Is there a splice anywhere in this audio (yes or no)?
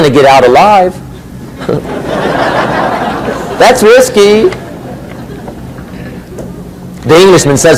no